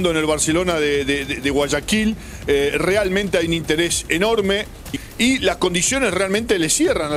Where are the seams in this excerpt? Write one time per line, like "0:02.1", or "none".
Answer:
0:04.9